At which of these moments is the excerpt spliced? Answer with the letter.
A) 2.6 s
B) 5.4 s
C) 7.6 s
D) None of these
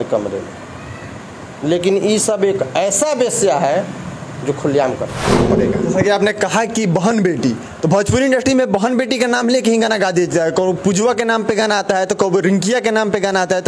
B